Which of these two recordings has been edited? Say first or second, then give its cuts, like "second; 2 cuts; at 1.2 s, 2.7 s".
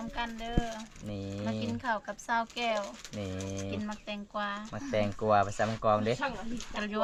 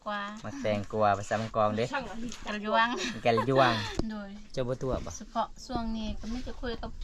second; 1 cut; at 3.9 s